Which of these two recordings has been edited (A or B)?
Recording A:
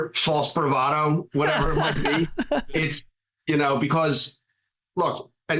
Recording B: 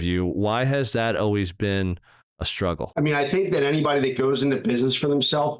B